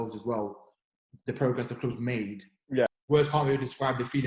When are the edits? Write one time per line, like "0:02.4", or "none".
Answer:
0:02.9